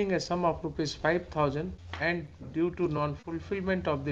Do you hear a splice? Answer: yes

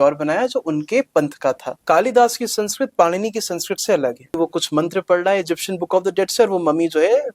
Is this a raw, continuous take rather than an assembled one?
no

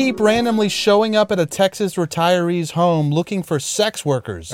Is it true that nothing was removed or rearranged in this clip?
yes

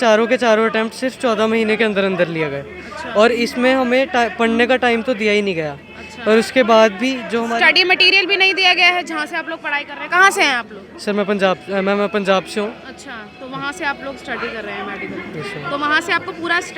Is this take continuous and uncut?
yes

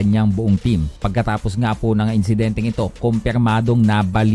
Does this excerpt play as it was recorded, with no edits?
no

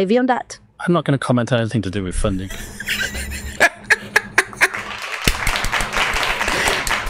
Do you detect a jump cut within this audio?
no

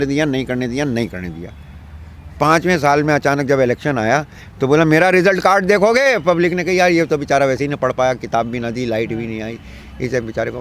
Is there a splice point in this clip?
no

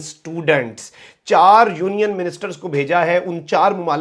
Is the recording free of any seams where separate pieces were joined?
yes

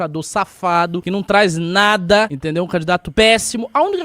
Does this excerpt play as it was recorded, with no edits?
no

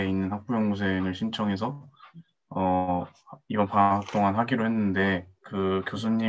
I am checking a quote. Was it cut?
yes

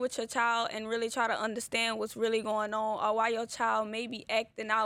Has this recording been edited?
no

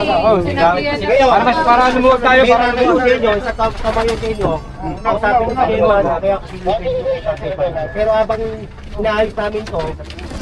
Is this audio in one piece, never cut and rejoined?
yes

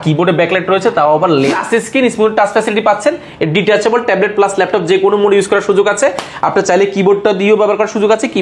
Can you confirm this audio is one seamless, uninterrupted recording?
no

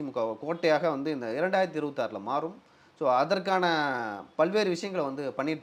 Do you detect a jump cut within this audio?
no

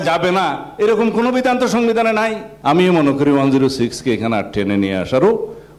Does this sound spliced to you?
yes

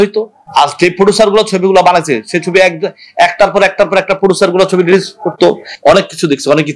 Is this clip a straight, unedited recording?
no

